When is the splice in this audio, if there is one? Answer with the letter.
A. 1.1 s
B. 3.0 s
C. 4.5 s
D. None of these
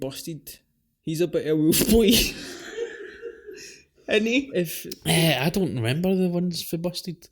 C